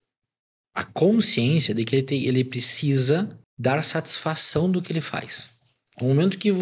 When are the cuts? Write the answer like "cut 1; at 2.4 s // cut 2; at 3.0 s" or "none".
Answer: cut 1; at 3.4 s